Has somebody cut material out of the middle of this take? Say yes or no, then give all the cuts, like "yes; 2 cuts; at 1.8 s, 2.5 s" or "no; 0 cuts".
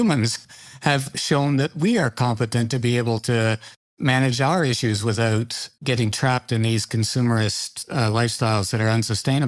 no; 0 cuts